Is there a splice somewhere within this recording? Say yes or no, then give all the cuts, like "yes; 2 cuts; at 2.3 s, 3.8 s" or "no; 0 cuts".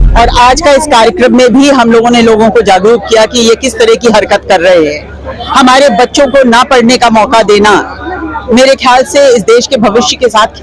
no; 0 cuts